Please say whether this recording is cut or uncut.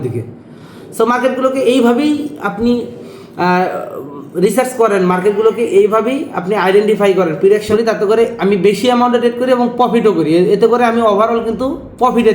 cut